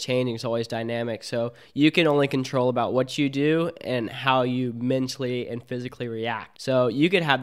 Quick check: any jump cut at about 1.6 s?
no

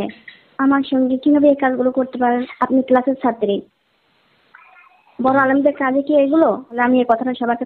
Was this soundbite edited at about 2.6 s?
yes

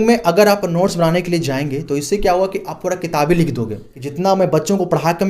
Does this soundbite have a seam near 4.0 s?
yes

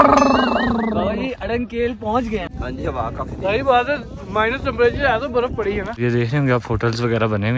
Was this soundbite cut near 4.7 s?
no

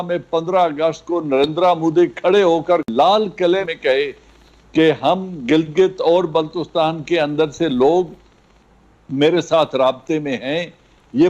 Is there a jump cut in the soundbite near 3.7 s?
yes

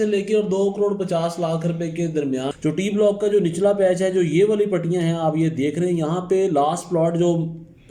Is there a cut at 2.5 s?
yes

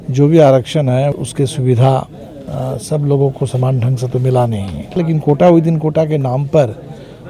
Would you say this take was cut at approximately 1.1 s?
yes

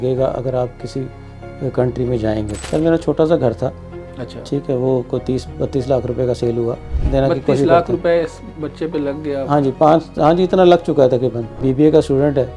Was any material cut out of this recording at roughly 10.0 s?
no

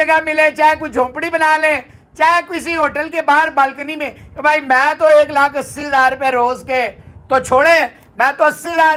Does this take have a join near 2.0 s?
no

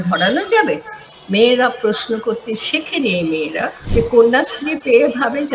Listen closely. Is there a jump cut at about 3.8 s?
yes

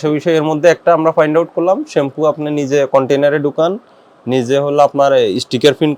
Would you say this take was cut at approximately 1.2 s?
no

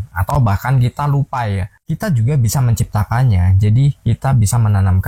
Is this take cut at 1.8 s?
yes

